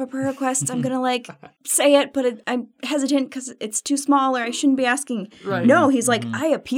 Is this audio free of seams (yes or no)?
yes